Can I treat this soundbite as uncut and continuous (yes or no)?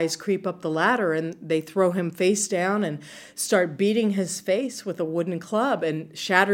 yes